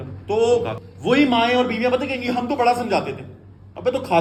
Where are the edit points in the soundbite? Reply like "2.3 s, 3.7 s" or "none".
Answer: none